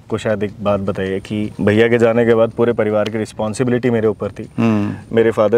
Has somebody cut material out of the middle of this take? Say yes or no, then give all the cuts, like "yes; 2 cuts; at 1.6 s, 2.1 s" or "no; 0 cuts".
yes; 1 cut; at 1.5 s